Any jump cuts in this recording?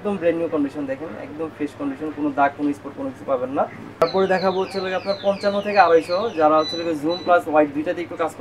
yes; 1 cut; at 4.0 s

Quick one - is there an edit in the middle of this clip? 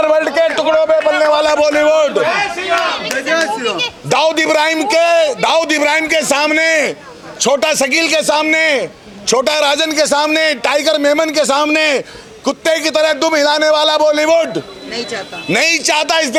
no; 0 cuts

